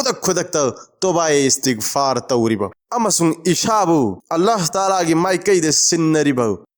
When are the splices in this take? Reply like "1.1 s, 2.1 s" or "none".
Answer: 2.8 s